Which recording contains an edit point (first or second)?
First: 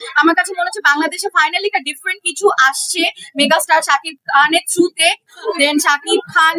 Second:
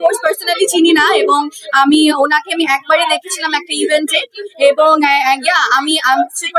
first